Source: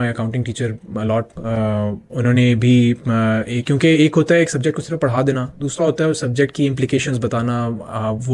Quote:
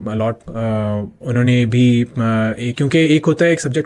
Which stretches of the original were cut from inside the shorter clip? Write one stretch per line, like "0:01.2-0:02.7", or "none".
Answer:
none